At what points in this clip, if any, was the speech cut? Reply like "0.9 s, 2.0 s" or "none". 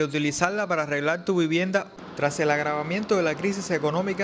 1.9 s